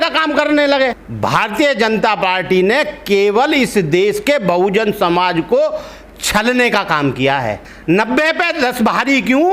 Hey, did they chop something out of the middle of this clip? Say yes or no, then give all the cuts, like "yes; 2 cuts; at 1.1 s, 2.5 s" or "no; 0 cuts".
yes; 2 cuts; at 1.1 s, 7.7 s